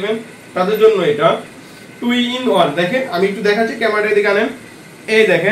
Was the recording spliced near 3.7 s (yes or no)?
no